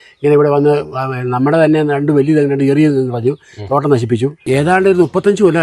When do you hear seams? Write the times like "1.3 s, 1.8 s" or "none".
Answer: 4.4 s